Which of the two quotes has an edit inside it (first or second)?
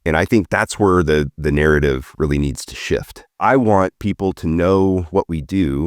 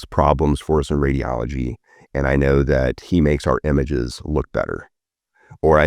first